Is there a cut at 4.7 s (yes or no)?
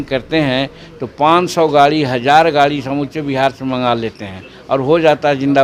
no